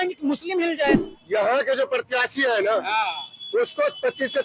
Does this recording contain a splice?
no; 0 cuts

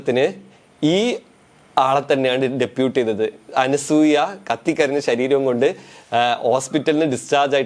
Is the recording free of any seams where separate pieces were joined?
yes; 0 cuts

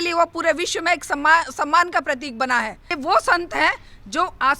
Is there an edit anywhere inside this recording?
yes; 1 cut; at 2.9 s

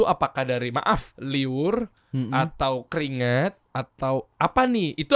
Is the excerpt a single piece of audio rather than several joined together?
no; 2 cuts; at 1.1 s, 3.7 s

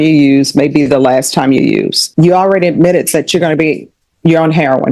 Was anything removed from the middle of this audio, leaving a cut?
yes; 1 cut; at 2.0 s

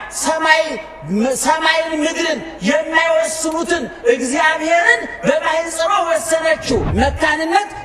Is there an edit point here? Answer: yes; 1 cut; at 6.9 s

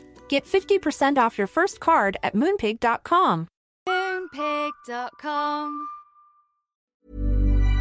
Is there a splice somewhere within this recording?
yes; 1 cut; at 6.8 s

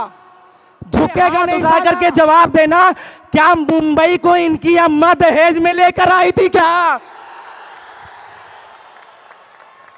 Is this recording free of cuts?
no; 1 cut; at 1.5 s

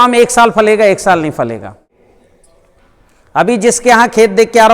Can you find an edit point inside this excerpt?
yes; 1 cut; at 2.0 s

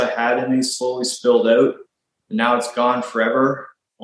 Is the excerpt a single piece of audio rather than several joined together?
yes; 0 cuts

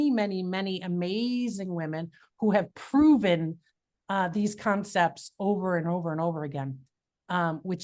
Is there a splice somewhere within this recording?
no; 0 cuts

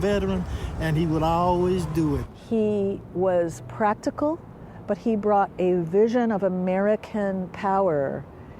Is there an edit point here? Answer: yes; 1 cut; at 2.2 s

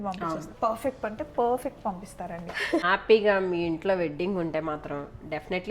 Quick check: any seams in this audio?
yes; 1 cut; at 2.8 s

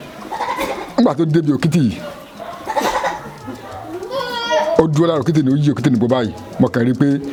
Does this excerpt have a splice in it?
no; 0 cuts

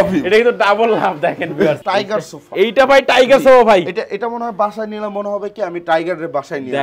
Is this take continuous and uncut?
no; 1 cut; at 1.8 s

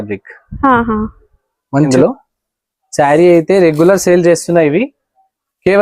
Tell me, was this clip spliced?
yes; 1 cut; at 1.9 s

